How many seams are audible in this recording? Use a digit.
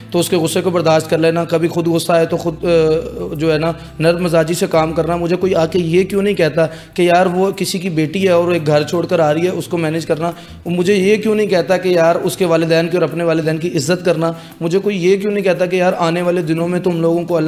0